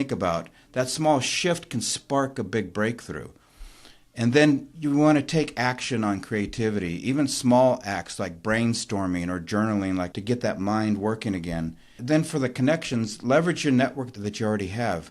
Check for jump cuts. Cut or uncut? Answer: cut